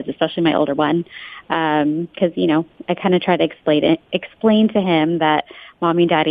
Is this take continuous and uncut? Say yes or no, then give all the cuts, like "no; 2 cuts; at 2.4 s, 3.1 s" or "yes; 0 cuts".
yes; 0 cuts